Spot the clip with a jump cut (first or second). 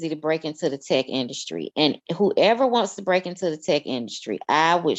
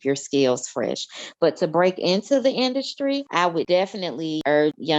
second